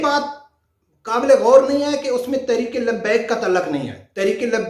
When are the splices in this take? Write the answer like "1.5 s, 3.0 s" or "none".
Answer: none